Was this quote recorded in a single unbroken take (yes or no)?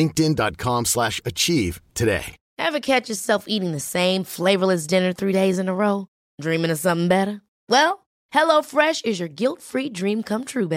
no